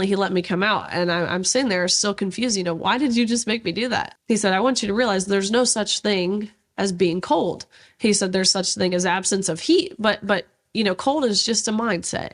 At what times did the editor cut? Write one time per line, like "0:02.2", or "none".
0:04.1